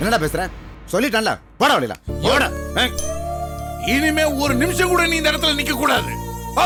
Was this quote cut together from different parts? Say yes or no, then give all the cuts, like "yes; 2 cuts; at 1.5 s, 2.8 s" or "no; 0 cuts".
no; 0 cuts